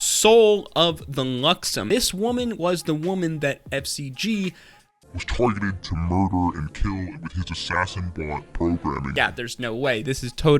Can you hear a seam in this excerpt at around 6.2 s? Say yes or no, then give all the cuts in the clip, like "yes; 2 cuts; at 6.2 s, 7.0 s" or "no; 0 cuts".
no; 2 cuts; at 1.9 s, 9.1 s